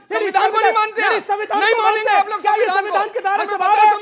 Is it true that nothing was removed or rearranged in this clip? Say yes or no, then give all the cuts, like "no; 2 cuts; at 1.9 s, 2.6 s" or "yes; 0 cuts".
yes; 0 cuts